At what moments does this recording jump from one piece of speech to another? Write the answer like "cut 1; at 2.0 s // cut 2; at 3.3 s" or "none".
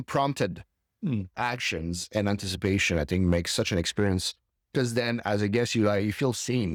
none